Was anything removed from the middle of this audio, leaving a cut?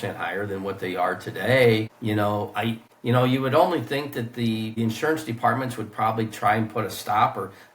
yes; 3 cuts; at 1.9 s, 2.9 s, 4.7 s

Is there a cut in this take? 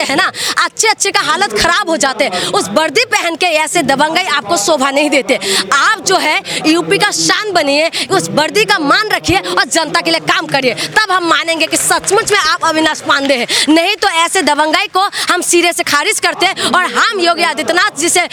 no; 0 cuts

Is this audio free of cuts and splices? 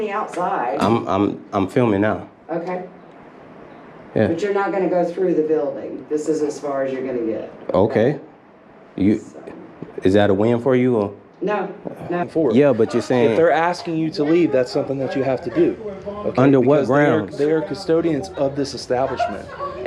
no; 1 cut; at 12.2 s

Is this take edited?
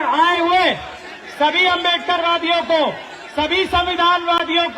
no; 0 cuts

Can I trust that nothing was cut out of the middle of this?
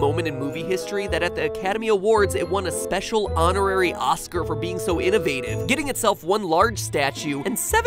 no; 1 cut; at 1.7 s

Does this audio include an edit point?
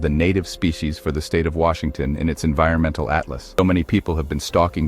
yes; 1 cut; at 3.6 s

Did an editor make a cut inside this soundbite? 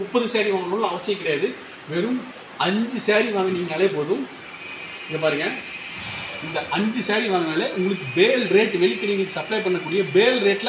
no; 0 cuts

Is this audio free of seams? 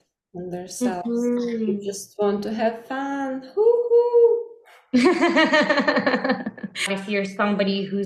no; 1 cut; at 7.0 s

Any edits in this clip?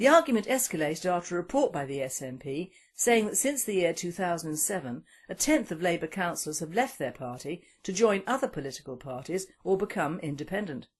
no; 0 cuts

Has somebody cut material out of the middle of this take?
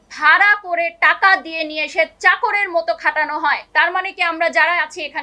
yes; 1 cut; at 3.6 s

